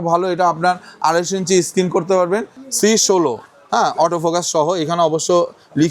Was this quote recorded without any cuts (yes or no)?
no